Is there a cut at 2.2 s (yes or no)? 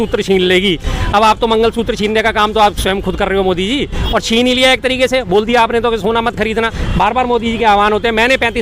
no